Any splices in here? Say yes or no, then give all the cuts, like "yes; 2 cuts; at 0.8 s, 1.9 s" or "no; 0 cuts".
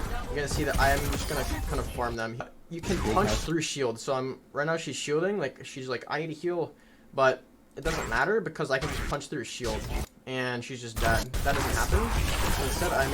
yes; 2 cuts; at 2.4 s, 11.3 s